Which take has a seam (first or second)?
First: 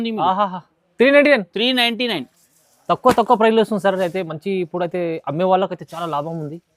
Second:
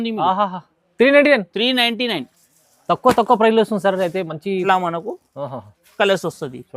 second